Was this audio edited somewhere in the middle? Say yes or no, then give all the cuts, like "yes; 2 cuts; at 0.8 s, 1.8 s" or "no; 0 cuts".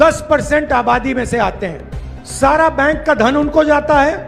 yes; 1 cut; at 2.2 s